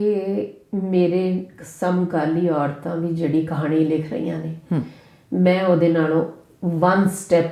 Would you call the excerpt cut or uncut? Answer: uncut